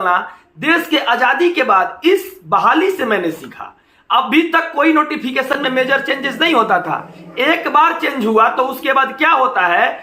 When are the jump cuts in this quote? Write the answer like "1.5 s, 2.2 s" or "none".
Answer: none